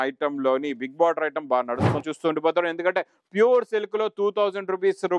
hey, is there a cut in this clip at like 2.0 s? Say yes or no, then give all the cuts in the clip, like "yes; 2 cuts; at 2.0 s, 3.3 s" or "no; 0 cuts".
yes; 1 cut; at 2.0 s